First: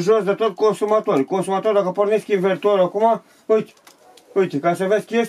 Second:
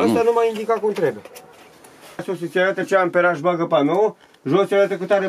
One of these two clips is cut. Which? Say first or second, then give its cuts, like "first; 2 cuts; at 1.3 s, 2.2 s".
second; 1 cut; at 2.2 s